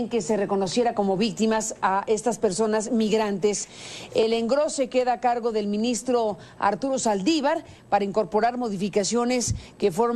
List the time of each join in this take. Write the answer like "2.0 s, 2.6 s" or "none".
none